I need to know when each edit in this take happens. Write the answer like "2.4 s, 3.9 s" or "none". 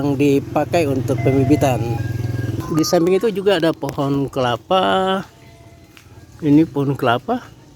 2.6 s